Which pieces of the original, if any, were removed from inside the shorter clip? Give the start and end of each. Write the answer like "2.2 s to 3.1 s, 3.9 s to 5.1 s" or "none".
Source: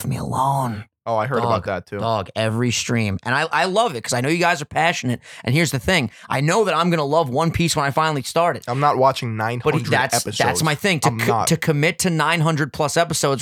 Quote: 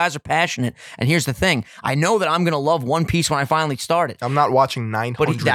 none